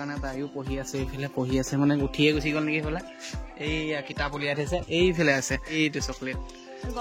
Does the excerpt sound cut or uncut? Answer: cut